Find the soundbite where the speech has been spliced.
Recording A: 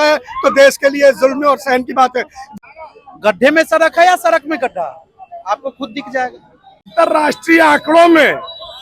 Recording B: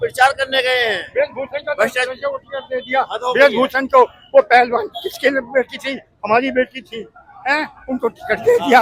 A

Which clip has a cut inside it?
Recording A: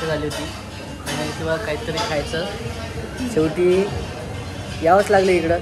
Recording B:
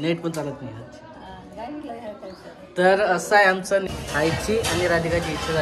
B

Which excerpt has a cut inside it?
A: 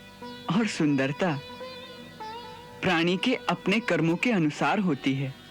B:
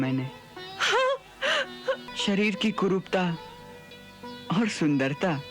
B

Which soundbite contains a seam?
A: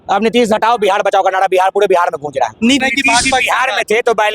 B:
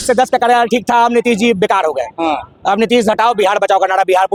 A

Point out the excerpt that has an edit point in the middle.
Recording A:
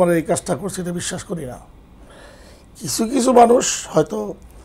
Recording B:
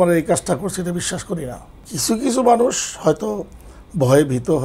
B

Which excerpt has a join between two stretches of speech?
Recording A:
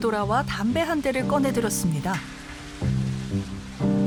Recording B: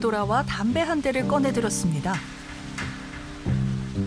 B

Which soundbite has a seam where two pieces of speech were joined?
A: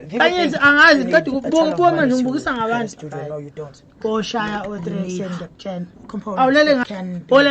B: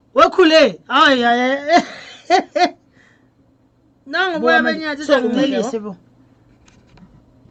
A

